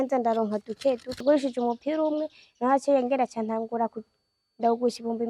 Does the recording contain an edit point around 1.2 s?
yes; 1 cut; at 1.2 s

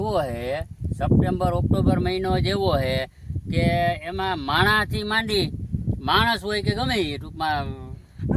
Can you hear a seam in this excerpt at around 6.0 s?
no; 0 cuts

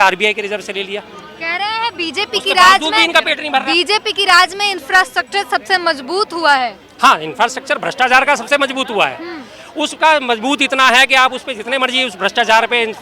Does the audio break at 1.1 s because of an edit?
no; 0 cuts

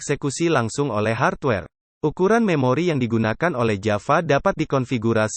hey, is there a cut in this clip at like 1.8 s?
yes; 1 cut; at 1.8 s

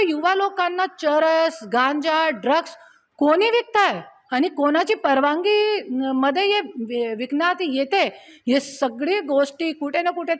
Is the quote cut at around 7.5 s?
no; 0 cuts

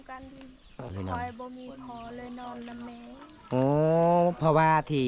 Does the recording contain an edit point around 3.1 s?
no; 1 cut; at 0.9 s

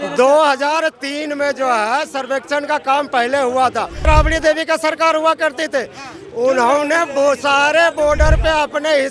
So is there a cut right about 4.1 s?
yes; 1 cut; at 4.1 s

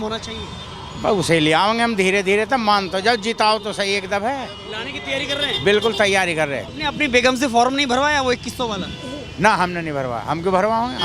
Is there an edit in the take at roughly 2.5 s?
no; 1 cut; at 6.7 s

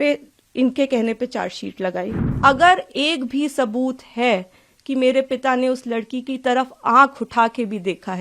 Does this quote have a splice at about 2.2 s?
yes; 1 cut; at 2.2 s

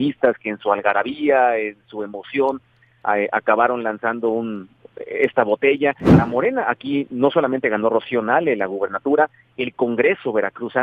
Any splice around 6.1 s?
yes; 1 cut; at 6.1 s

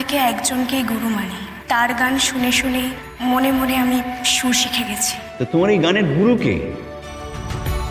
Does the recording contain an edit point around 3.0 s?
yes; 2 cuts; at 1.5 s, 3.0 s

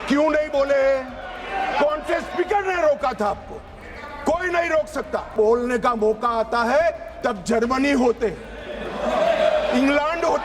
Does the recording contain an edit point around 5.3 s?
yes; 1 cut; at 5.3 s

